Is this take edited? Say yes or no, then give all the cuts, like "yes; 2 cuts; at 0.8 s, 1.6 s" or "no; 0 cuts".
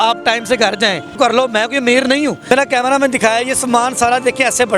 yes; 2 cuts; at 1.1 s, 2.5 s